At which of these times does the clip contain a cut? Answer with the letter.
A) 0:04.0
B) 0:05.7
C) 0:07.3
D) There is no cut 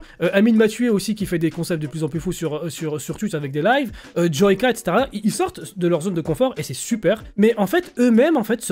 C